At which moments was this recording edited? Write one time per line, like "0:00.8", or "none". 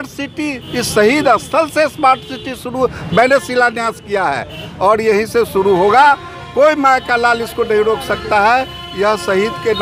none